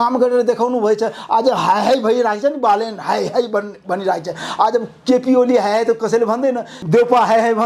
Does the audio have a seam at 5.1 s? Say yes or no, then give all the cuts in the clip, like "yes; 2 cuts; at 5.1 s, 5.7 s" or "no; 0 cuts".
no; 1 cut; at 6.7 s